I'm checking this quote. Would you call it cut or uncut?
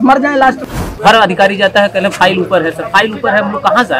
cut